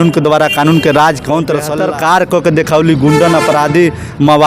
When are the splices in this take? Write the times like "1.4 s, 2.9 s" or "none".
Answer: 1.7 s

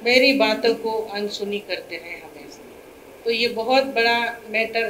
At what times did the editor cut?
none

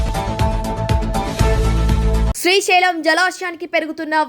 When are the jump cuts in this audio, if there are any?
2.3 s

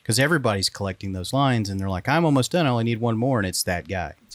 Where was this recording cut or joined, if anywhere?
none

